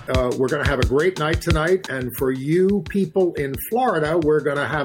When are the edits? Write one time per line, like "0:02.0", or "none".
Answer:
none